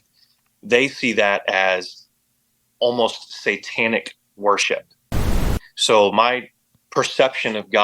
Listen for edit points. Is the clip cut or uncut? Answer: cut